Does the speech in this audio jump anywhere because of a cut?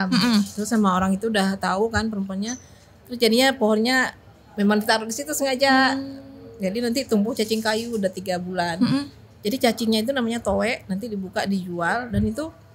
no; 0 cuts

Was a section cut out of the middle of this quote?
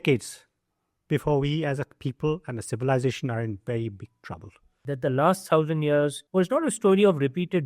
yes; 2 cuts; at 4.7 s, 6.2 s

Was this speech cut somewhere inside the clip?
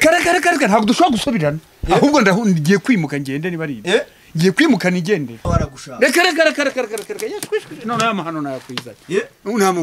yes; 1 cut; at 5.5 s

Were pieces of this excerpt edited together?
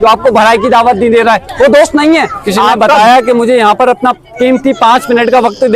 yes; 1 cut; at 2.8 s

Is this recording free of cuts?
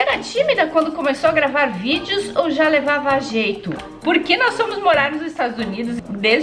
no; 1 cut; at 3.8 s

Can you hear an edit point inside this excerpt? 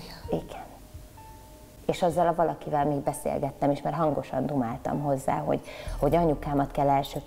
no; 0 cuts

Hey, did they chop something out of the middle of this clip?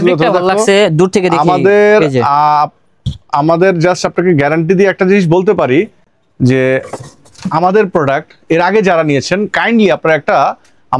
no; 0 cuts

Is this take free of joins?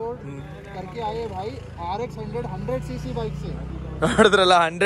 yes; 0 cuts

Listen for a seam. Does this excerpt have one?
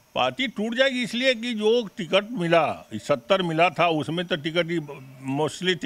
no; 0 cuts

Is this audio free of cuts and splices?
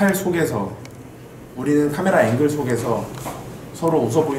yes; 0 cuts

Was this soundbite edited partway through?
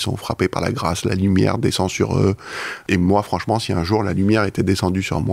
yes; 1 cut; at 2.8 s

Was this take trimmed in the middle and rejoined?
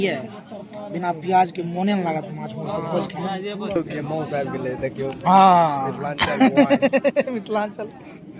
yes; 1 cut; at 3.8 s

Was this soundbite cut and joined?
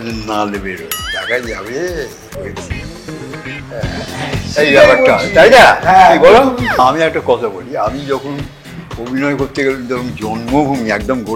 yes; 1 cut; at 6.8 s

